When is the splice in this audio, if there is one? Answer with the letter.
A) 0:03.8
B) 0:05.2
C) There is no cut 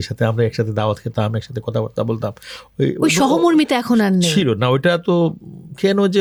C